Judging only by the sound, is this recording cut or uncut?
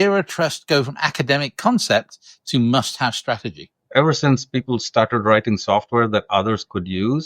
cut